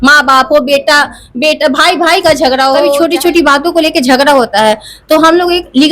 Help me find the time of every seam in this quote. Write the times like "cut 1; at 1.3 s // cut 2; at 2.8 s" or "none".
cut 1; at 3.0 s